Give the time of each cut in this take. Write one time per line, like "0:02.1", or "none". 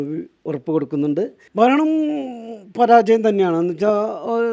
0:01.4